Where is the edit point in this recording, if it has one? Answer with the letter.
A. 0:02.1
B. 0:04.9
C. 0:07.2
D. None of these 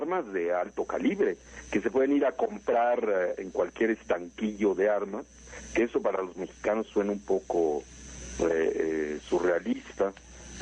D